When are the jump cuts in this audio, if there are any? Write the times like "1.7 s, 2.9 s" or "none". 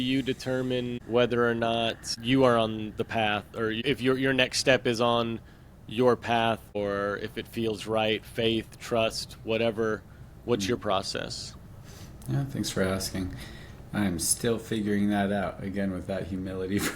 1.0 s, 2.1 s, 3.8 s, 6.8 s